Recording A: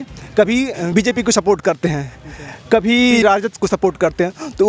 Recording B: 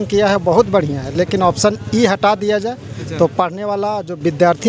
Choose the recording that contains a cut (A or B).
A